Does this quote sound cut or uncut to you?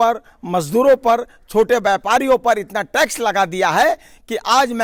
uncut